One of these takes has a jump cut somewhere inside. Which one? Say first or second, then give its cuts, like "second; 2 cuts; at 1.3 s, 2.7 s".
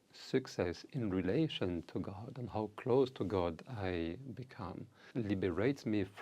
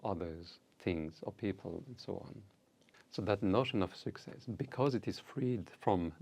first; 1 cut; at 5.0 s